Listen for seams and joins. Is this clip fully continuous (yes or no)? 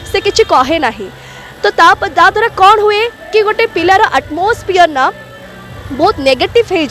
yes